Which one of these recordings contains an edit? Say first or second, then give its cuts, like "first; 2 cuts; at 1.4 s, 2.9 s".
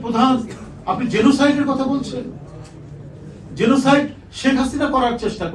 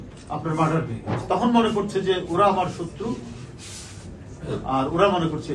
second; 1 cut; at 1.1 s